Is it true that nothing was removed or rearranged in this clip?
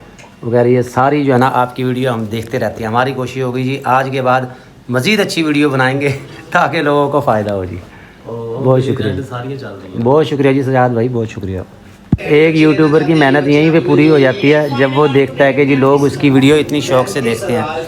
yes; 0 cuts

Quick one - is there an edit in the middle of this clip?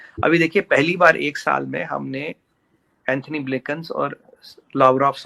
no; 0 cuts

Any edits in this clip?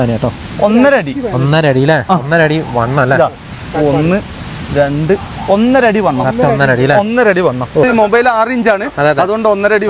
yes; 1 cut; at 7.9 s

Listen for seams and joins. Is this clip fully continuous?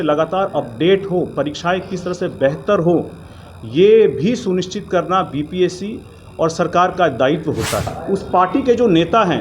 no; 1 cut; at 8.0 s

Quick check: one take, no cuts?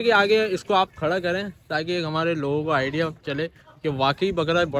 yes; 0 cuts

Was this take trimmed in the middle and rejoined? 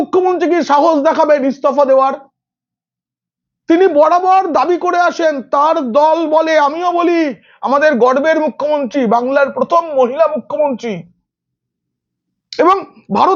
no; 0 cuts

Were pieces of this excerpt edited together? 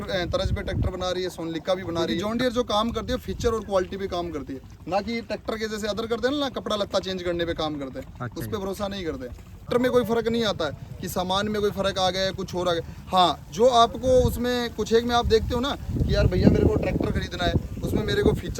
yes; 2 cuts; at 2.1 s, 9.6 s

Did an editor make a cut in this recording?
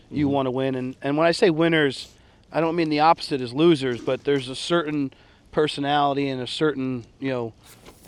no; 0 cuts

